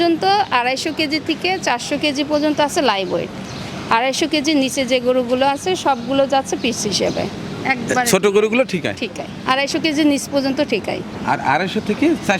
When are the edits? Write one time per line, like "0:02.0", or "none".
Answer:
none